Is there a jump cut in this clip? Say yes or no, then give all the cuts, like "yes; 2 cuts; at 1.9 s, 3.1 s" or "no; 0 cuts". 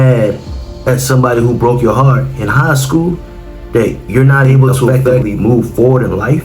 yes; 1 cut; at 5.2 s